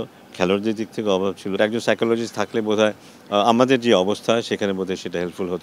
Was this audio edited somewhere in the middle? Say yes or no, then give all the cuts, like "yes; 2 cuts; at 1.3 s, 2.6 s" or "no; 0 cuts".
yes; 1 cut; at 1.6 s